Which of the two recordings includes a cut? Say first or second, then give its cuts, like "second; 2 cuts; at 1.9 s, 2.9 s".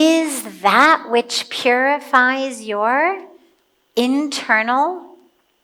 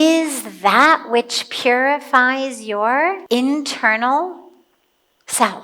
second; 1 cut; at 3.2 s